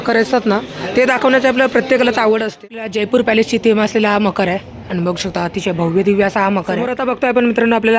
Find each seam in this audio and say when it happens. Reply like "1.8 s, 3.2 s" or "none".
2.9 s, 6.9 s